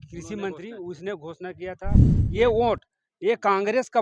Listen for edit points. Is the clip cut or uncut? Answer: cut